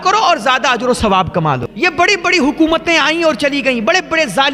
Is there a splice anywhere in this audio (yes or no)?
yes